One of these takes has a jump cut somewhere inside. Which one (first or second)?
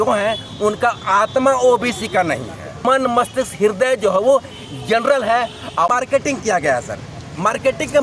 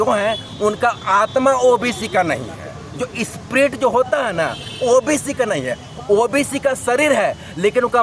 first